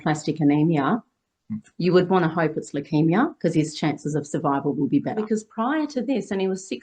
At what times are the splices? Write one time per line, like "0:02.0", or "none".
0:05.2